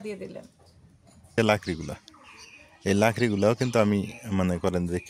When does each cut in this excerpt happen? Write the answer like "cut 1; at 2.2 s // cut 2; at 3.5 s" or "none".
cut 1; at 1.4 s

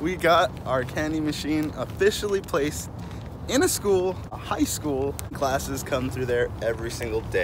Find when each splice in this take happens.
cut 1; at 4.3 s // cut 2; at 5.4 s

